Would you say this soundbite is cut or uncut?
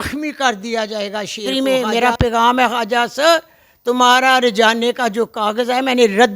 cut